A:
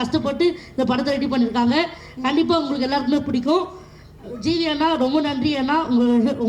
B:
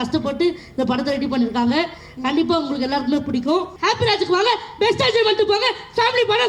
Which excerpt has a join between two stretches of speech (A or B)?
B